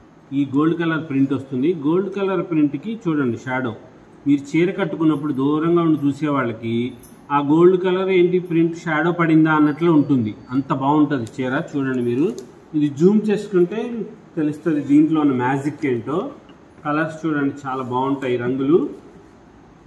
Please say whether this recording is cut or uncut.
uncut